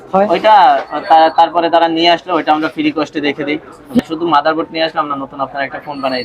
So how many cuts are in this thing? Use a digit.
1